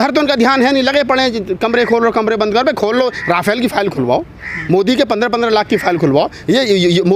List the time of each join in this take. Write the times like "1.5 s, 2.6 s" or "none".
none